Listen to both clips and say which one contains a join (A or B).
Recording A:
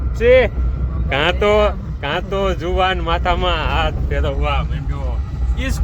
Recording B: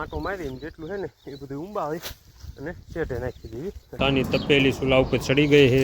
B